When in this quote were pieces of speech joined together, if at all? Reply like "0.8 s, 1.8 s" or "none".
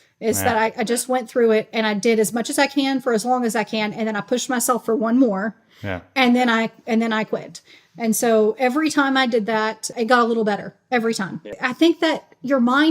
9.9 s, 11.6 s